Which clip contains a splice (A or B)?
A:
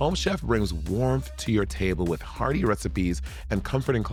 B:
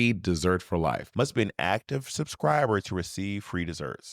B